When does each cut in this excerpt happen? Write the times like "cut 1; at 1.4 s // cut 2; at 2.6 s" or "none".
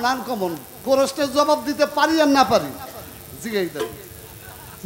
none